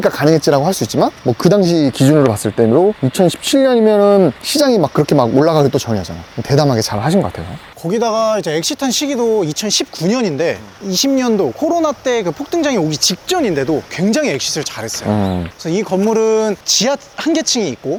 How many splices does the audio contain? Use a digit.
0